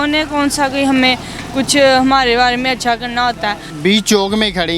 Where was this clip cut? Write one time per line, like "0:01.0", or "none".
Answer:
0:03.6